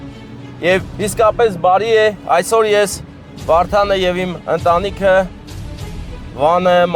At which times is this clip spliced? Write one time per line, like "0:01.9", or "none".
none

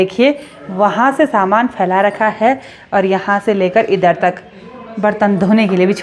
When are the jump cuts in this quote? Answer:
none

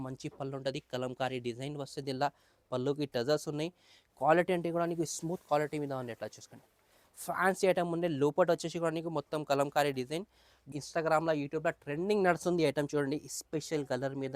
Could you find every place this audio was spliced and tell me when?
0:10.7

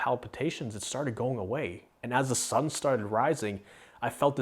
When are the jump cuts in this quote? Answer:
none

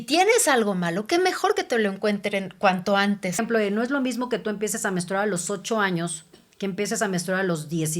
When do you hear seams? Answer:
0:03.4

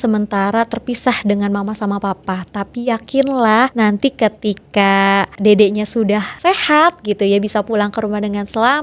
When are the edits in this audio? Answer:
0:03.7
0:05.3
0:06.3

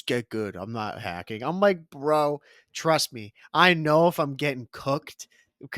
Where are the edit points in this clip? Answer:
none

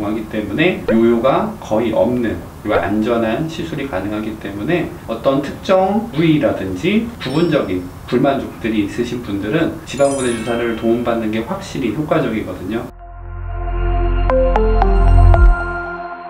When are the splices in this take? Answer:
0:02.5
0:05.0
0:07.2
0:09.8
0:12.9

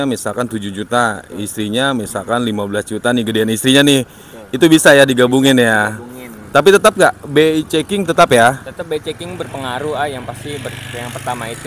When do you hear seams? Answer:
none

